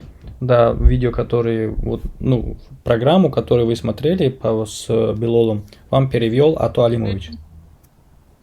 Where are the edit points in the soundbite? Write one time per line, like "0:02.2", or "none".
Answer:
none